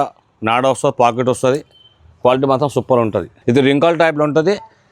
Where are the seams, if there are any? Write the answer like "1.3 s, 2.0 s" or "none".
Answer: 3.3 s